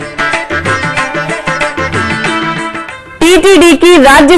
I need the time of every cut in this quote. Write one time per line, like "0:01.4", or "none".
0:02.8